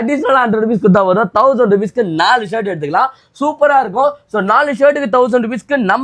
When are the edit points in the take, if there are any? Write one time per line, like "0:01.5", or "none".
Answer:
none